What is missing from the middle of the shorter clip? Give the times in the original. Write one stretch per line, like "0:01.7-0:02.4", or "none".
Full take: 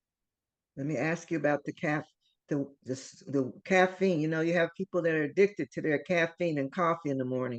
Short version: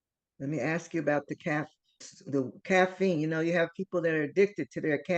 0:02.4-0:03.0